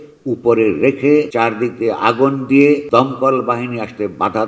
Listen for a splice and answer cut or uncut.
cut